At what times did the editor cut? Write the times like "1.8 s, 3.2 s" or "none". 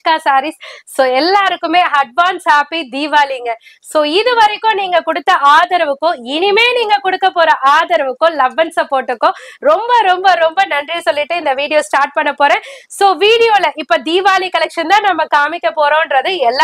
none